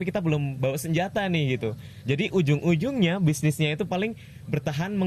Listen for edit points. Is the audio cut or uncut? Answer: uncut